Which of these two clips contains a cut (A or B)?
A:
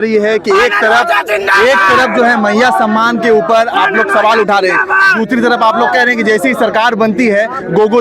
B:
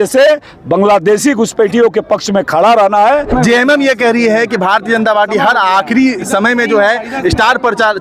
B